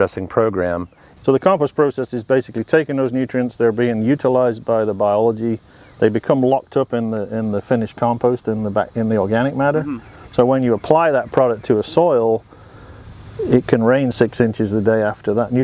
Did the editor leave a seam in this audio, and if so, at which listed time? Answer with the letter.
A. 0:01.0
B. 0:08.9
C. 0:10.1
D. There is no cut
A